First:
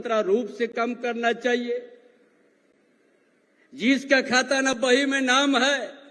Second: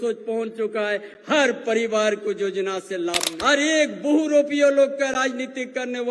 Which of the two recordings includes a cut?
second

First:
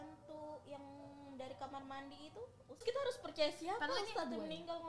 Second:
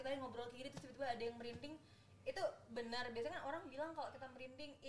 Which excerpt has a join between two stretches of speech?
first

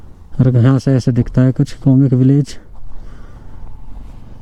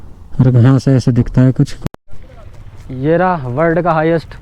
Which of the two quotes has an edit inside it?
second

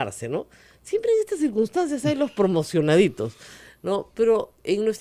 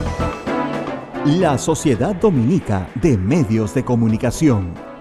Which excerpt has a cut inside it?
second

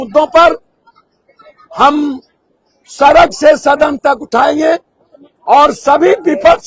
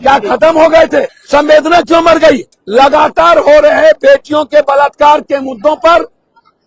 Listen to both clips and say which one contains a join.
second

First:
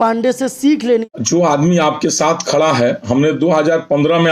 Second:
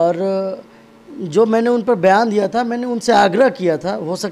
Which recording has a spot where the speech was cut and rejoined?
first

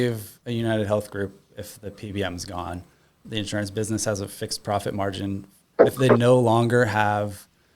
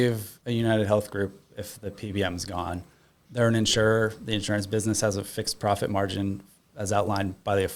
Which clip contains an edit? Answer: first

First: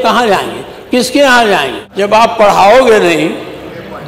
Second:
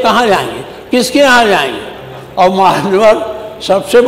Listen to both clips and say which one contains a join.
first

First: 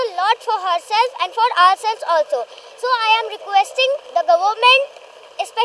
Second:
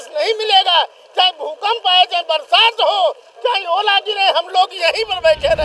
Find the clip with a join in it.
first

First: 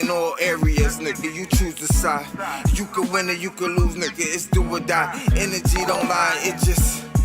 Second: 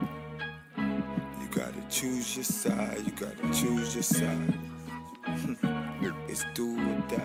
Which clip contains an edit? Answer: first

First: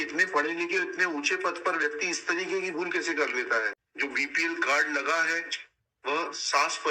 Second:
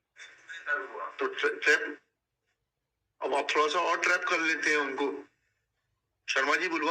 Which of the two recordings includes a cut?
first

